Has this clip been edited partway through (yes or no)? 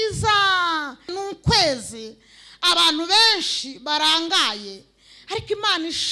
yes